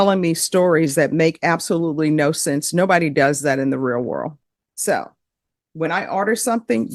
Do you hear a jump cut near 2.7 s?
no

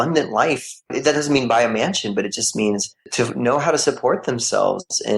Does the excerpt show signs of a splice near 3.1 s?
yes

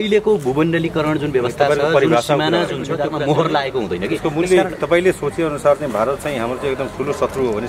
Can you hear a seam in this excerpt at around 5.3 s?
no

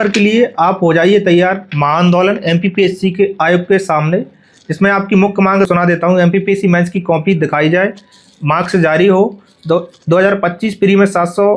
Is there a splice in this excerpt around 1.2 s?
no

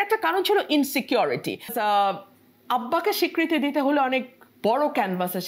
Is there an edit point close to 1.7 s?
yes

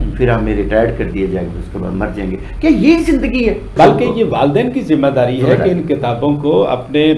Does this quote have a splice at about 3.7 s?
yes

